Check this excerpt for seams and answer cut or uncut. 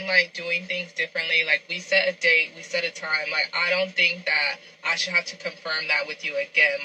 uncut